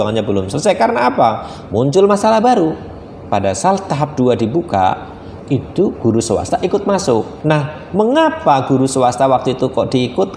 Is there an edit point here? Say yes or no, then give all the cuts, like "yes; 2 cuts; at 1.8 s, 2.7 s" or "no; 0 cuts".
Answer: yes; 1 cut; at 7.3 s